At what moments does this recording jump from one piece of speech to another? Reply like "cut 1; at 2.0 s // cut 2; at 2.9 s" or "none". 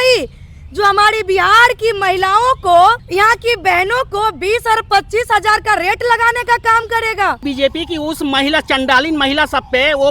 cut 1; at 3.0 s // cut 2; at 7.4 s

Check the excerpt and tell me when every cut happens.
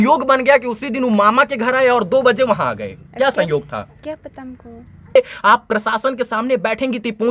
cut 1; at 5.2 s

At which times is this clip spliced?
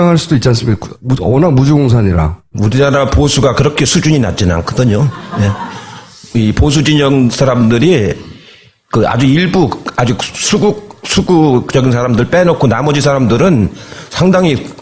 cut 1; at 3.6 s

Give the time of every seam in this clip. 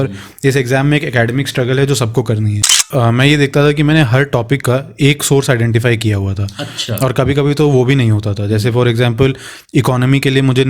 cut 1; at 2.8 s

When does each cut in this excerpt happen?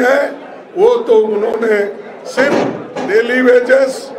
cut 1; at 2.9 s

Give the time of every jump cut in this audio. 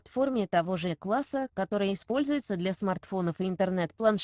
cut 1; at 2.9 s

